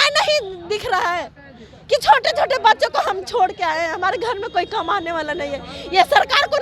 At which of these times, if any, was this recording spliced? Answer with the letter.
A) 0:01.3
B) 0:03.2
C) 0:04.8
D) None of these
D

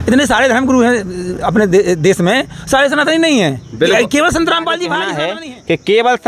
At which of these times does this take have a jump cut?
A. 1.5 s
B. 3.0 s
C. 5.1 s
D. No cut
C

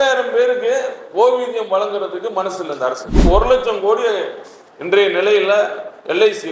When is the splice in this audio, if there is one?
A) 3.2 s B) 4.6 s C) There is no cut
A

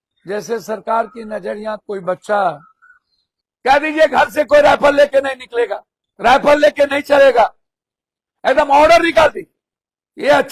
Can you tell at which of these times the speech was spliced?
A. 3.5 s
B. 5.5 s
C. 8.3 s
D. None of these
A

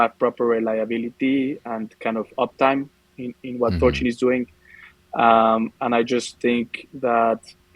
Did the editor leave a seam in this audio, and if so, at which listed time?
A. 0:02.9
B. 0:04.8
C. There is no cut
C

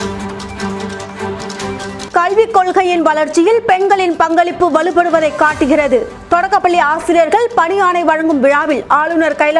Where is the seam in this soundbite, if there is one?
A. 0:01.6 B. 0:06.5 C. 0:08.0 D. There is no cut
A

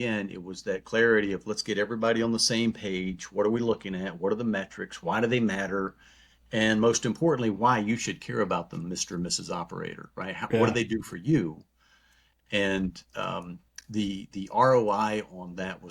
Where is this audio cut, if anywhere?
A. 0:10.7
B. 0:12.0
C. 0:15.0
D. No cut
D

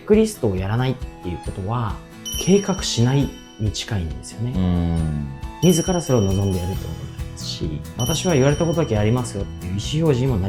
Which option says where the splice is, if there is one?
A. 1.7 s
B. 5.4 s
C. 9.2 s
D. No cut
B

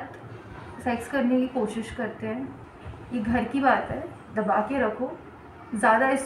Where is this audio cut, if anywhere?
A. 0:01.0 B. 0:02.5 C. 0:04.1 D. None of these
B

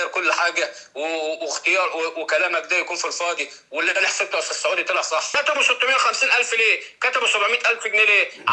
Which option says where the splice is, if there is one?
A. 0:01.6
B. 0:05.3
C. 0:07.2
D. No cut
B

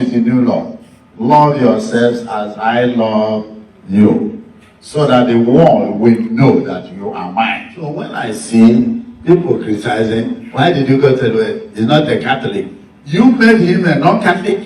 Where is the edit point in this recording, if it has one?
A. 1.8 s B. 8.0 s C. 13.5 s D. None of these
C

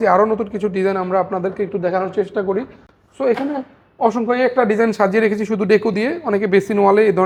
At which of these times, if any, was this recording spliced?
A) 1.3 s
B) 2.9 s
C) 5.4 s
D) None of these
D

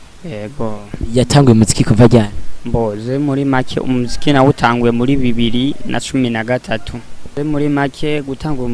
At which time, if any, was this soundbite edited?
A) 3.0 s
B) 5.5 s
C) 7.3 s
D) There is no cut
C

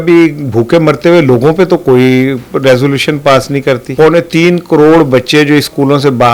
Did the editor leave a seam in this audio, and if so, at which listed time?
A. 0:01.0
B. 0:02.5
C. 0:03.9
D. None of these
C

